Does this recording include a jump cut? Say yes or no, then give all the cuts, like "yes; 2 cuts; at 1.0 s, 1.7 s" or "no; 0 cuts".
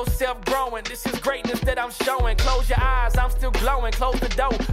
no; 0 cuts